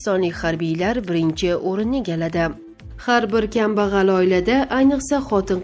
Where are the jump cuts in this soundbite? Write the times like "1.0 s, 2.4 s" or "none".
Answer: 2.7 s